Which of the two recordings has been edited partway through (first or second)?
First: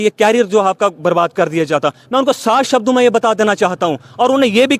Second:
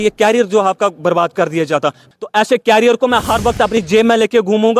second